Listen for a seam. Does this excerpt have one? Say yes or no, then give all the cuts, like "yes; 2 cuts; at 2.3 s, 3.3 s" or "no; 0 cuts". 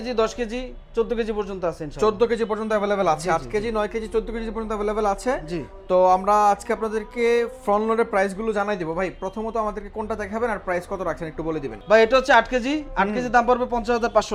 no; 0 cuts